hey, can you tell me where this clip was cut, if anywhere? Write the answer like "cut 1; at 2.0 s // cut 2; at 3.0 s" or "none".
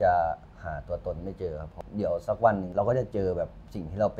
cut 1; at 1.7 s // cut 2; at 2.7 s